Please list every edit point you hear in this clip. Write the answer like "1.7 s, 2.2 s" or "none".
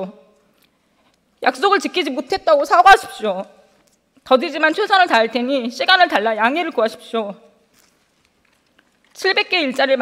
none